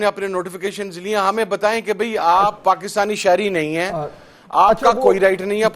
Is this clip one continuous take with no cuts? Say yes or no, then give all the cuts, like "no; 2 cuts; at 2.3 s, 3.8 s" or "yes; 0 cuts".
yes; 0 cuts